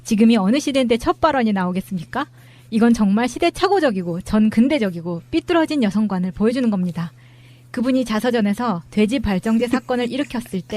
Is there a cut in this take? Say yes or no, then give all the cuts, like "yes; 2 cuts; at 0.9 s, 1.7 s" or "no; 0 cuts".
yes; 1 cut; at 5.3 s